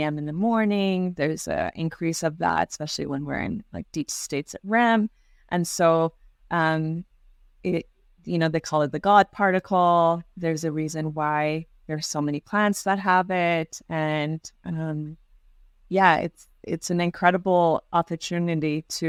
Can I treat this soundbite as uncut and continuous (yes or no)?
yes